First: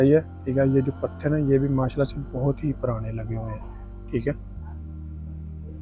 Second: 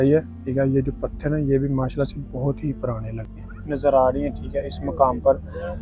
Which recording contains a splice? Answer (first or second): second